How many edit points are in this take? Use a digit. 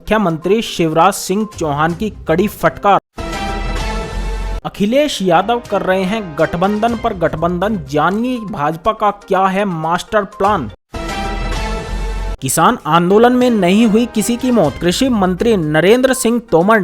2